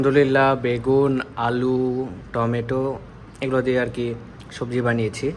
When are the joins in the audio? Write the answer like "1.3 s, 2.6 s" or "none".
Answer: none